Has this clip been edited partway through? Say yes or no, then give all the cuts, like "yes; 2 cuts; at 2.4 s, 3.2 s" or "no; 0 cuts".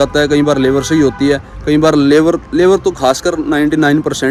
no; 0 cuts